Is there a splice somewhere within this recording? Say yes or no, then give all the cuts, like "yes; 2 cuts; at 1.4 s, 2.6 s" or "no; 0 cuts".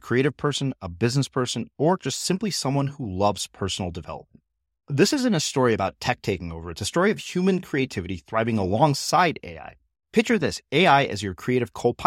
no; 0 cuts